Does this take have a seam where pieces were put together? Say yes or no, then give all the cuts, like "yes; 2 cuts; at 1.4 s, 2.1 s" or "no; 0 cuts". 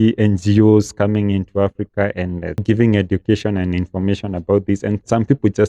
yes; 1 cut; at 2.6 s